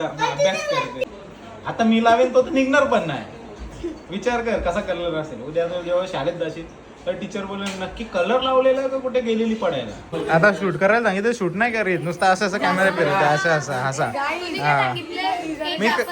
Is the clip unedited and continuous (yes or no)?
no